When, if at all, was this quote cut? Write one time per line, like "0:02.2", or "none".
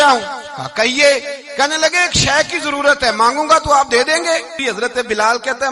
0:04.6